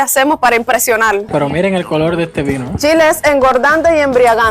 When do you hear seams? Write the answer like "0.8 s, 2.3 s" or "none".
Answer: 1.3 s, 2.7 s

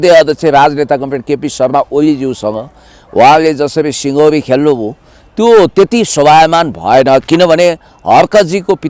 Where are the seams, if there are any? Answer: none

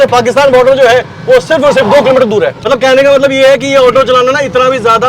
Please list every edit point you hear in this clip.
2.6 s

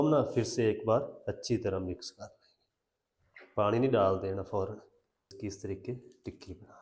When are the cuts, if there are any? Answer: 5.3 s

